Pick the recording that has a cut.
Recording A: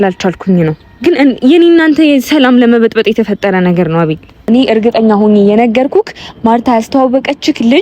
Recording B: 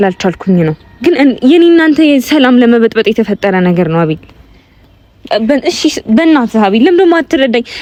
A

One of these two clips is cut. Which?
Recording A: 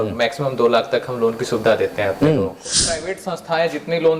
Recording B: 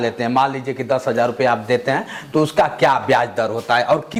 A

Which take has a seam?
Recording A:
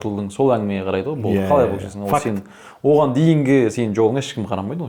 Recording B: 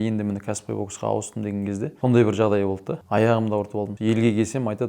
B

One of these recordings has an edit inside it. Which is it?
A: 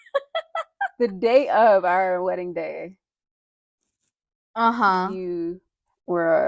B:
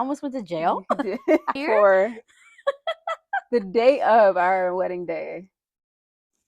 B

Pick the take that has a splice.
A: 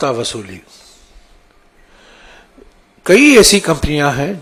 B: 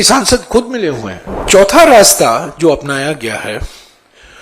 B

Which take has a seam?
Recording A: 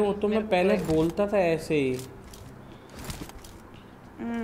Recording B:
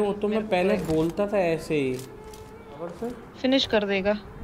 B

